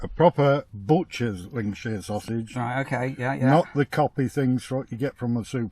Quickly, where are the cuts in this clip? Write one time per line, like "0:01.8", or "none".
none